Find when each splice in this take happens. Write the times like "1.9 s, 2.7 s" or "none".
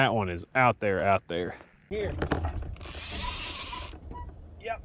1.9 s